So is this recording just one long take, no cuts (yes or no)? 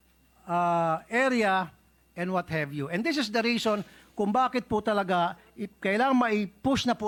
yes